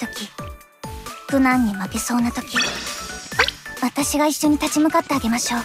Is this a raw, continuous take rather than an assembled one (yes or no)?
yes